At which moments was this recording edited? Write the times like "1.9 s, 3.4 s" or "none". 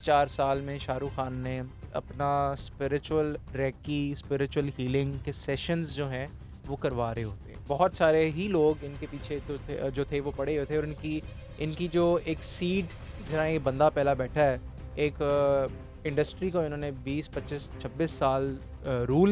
1.8 s, 7.7 s